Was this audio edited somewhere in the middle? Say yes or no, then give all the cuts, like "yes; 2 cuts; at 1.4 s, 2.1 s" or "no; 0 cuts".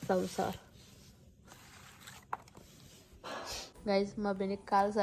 yes; 1 cut; at 3.8 s